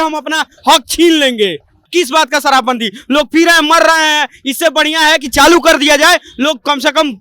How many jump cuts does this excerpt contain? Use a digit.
1